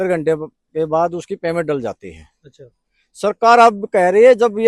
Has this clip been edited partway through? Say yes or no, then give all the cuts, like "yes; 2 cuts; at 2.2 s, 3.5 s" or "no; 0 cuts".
no; 0 cuts